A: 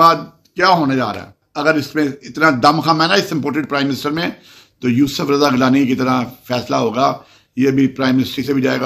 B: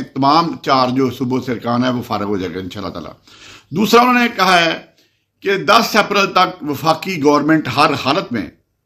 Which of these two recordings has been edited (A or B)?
A